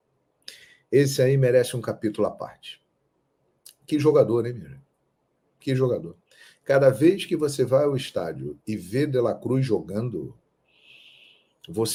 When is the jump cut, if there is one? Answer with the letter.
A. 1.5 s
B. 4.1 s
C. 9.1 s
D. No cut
D